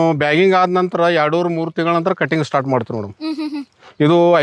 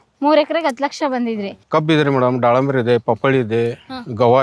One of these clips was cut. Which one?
second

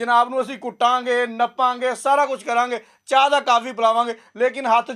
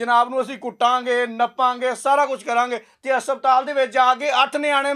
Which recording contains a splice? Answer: second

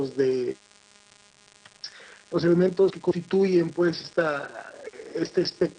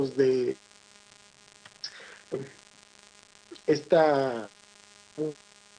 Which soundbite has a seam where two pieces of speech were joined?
first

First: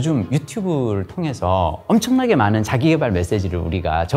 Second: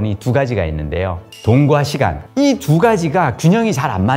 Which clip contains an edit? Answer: second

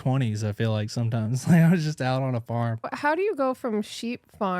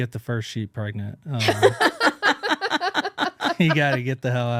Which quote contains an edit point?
first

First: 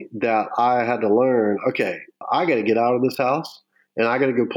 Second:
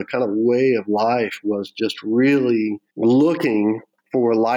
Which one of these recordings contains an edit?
second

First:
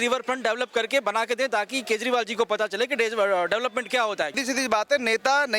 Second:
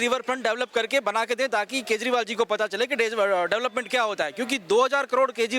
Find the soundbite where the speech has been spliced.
first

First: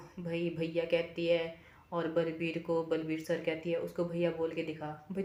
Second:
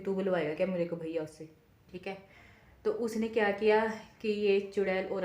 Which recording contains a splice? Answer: second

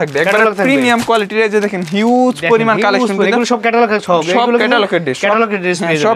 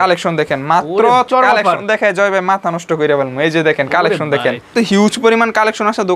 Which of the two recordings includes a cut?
second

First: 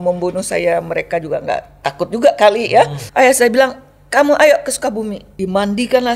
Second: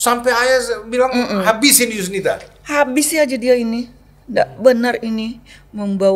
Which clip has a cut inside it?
first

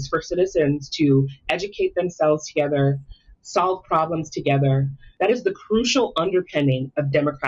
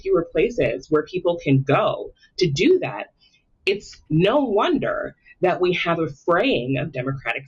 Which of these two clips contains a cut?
first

